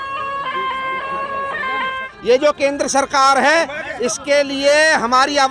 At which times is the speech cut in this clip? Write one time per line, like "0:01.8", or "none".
0:02.1